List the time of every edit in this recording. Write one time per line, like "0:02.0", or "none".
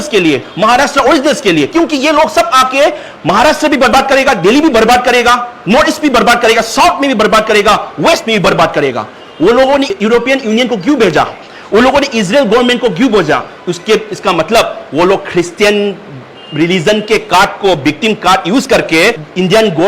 none